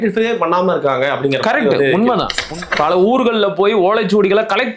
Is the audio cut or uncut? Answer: cut